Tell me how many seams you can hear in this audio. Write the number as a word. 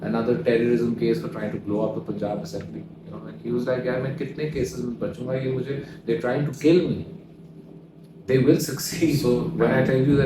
one